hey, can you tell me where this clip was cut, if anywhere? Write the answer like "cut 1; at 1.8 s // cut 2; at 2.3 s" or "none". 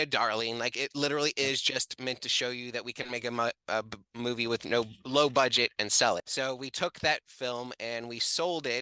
cut 1; at 6.3 s